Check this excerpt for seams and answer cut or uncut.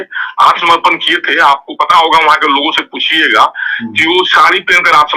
uncut